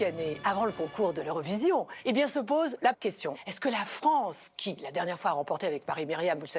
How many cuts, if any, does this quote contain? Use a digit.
2